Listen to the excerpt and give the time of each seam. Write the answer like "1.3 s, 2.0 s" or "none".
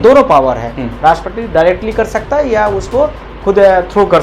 none

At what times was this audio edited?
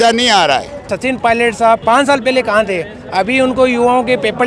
0.9 s, 1.8 s

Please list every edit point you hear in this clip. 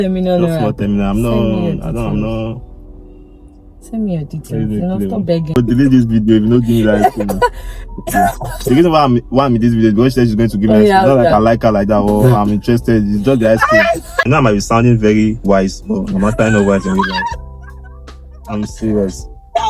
5.6 s, 14.1 s

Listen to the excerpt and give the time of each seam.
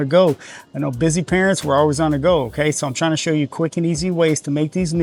none

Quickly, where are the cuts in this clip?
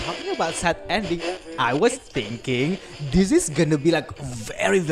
none

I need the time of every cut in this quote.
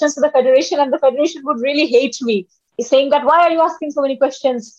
2.8 s

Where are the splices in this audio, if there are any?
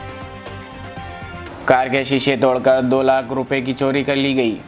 1.4 s

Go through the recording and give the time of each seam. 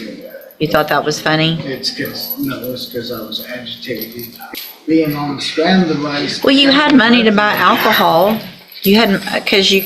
4.4 s

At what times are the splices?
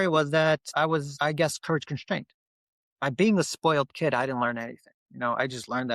0.9 s

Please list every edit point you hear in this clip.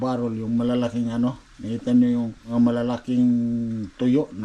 2.4 s

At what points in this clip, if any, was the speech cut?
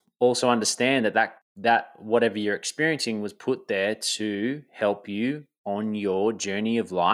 1.4 s

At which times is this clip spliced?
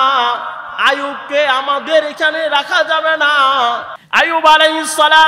3.9 s

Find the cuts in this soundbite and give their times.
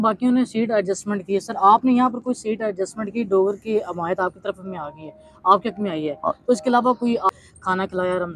7.3 s

